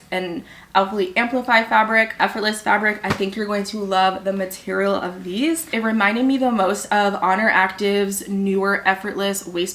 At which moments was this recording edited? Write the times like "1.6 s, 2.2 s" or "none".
2.1 s, 5.7 s